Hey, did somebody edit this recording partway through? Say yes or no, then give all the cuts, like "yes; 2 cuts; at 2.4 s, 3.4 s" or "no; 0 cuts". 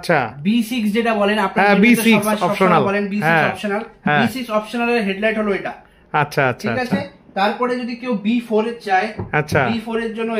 no; 0 cuts